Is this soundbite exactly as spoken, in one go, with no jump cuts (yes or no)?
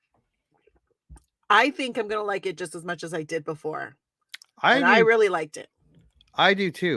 yes